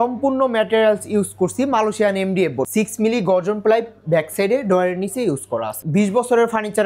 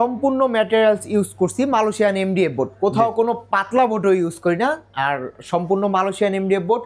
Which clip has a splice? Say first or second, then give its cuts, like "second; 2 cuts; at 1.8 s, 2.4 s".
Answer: first; 2 cuts; at 2.7 s, 5.7 s